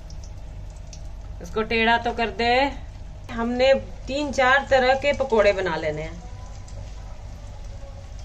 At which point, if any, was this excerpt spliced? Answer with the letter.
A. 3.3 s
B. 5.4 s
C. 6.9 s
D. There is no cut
A